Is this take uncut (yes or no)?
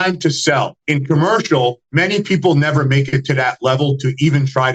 yes